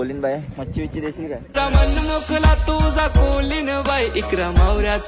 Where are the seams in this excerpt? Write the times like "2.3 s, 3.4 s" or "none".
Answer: none